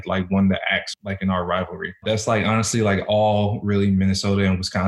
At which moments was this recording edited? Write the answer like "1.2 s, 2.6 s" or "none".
0.9 s, 2.0 s